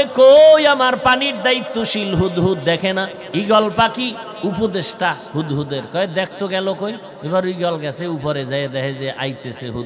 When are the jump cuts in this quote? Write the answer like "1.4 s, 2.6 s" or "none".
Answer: 3.2 s, 4.3 s, 7.1 s